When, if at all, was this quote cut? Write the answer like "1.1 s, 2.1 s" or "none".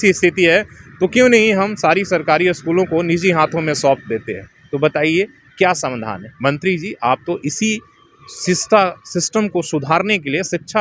none